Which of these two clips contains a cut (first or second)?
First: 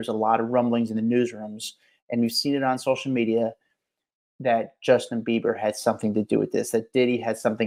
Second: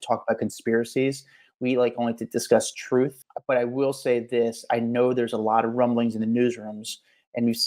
second